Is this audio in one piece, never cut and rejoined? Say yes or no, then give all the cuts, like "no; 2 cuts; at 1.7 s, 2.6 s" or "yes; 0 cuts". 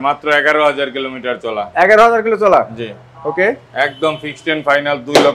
yes; 0 cuts